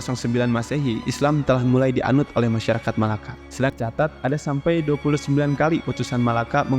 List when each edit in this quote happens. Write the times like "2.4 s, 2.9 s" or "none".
3.7 s